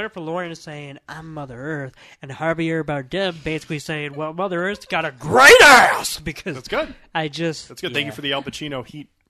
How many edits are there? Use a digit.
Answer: 0